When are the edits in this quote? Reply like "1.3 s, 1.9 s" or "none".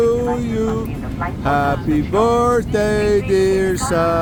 none